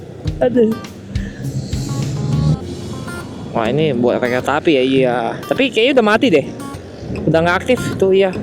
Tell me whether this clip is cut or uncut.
cut